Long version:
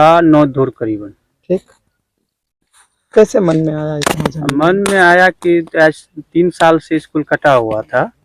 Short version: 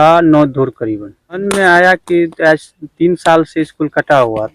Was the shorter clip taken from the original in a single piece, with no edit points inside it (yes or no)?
no